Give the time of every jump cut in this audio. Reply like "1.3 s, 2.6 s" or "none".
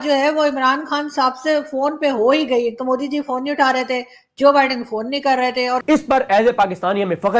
5.8 s